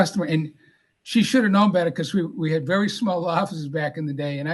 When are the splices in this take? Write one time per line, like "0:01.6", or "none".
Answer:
none